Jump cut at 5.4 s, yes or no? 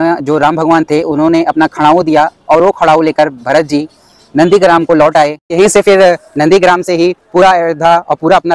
yes